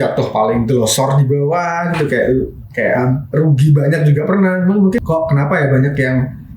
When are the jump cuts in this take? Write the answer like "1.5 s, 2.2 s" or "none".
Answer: 5.0 s